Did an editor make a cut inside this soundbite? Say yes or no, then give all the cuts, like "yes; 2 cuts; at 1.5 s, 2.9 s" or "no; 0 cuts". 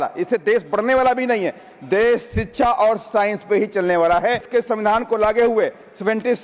yes; 1 cut; at 4.5 s